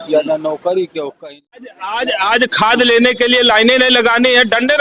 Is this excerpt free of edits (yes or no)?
no